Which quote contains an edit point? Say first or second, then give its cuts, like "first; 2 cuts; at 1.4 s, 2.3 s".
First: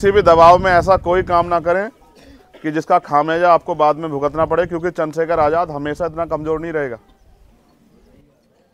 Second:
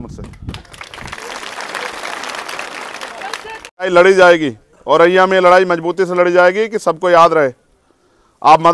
second; 1 cut; at 3.9 s